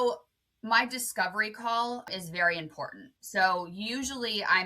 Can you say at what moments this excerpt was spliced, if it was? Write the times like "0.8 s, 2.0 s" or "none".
2.1 s